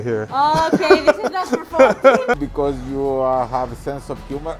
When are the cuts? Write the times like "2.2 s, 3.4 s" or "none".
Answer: 2.3 s